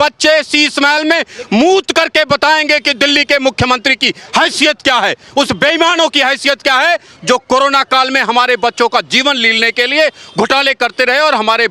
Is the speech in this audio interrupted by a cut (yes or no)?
no